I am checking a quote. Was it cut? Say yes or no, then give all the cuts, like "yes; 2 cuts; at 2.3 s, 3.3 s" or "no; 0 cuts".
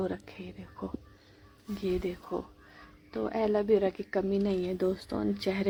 no; 0 cuts